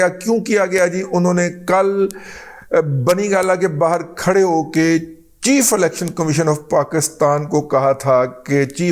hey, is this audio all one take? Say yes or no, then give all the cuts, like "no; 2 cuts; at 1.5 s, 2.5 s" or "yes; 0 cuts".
yes; 0 cuts